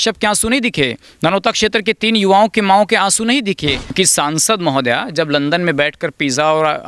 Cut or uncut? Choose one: cut